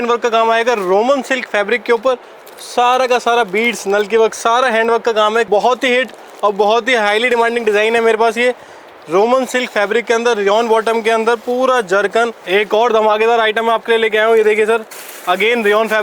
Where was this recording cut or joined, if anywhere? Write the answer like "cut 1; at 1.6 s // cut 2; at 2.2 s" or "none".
cut 1; at 5.5 s // cut 2; at 12.4 s